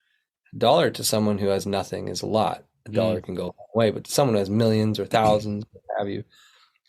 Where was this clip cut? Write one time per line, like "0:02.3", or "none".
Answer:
none

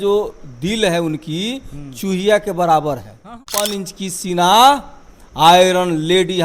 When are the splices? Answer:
0:03.4

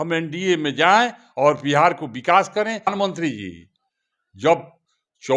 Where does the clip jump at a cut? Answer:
0:02.9

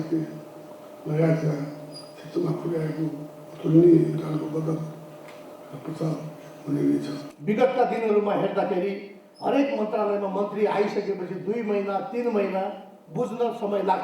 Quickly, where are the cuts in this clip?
0:07.3

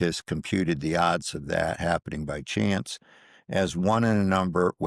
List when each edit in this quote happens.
none

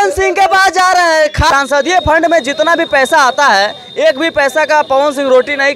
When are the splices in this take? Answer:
0:01.5

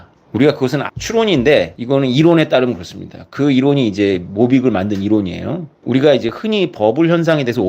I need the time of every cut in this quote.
0:00.9
0:01.8
0:05.7

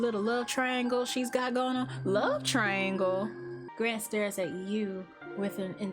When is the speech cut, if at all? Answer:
0:03.6

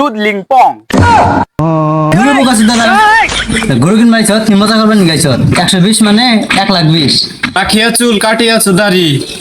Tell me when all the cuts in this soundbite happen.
0:02.1
0:07.6

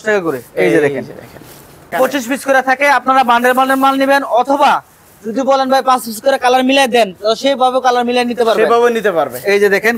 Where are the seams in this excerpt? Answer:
0:02.2

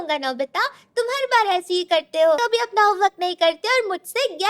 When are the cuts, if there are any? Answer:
0:02.4

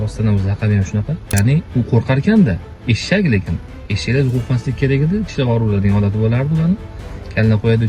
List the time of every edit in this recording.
0:01.3

